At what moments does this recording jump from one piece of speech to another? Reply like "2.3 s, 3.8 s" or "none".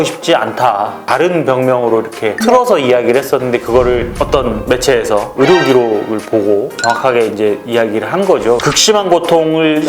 1.0 s, 8.6 s